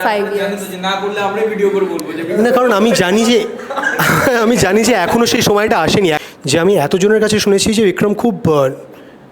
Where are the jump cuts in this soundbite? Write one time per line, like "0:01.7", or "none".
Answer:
0:06.2